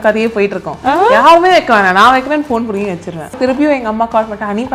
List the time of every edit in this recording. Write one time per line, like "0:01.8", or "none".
0:03.3